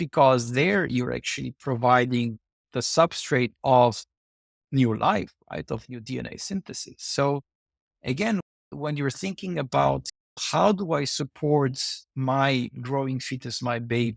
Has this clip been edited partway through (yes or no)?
no